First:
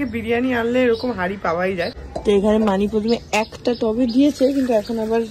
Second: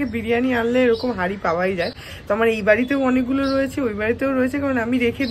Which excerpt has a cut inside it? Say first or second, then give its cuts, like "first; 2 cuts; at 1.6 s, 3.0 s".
first; 1 cut; at 2.0 s